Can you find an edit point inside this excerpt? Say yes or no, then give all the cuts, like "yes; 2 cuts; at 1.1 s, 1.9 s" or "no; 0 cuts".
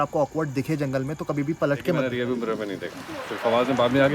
yes; 1 cut; at 2.1 s